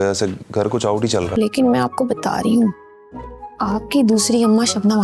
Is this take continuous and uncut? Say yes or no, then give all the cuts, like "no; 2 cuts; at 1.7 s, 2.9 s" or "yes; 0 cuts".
no; 1 cut; at 1.3 s